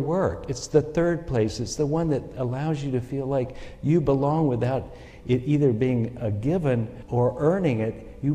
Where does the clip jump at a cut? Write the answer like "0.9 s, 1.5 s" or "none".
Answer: 7.0 s